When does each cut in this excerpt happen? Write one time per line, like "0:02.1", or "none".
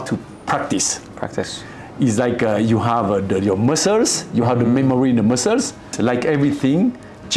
0:05.9